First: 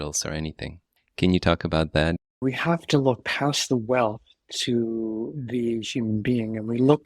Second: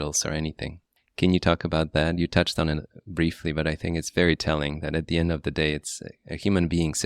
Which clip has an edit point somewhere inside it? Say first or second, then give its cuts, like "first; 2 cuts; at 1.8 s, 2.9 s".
first; 1 cut; at 2.2 s